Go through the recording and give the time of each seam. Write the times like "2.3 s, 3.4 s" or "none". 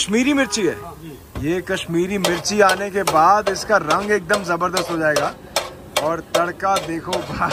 none